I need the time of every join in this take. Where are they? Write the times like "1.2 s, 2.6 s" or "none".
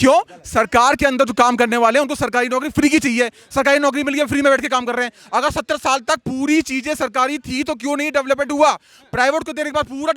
none